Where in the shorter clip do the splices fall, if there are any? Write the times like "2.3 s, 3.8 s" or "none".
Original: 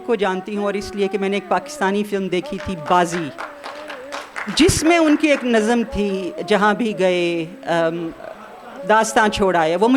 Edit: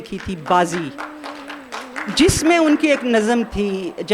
none